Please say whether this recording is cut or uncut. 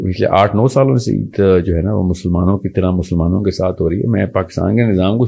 uncut